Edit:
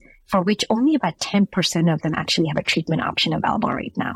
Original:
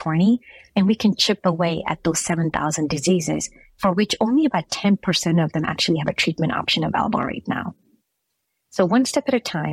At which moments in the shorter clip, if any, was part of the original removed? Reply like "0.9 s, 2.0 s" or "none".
none